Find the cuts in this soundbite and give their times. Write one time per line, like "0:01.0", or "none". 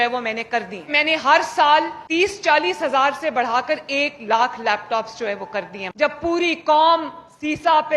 0:00.9
0:02.0
0:05.8